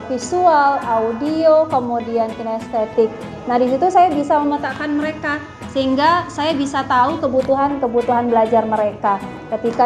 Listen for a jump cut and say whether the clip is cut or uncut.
uncut